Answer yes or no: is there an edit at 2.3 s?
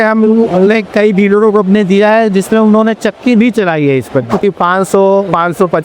no